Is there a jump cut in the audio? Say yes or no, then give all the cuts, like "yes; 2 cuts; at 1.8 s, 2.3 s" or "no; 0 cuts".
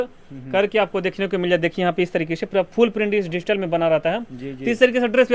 no; 0 cuts